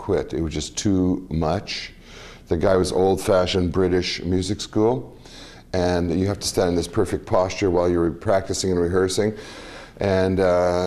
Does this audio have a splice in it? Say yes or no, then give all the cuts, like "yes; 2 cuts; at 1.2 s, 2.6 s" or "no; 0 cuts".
no; 0 cuts